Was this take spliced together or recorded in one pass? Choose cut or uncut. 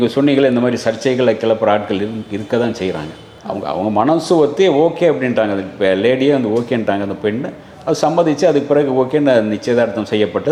uncut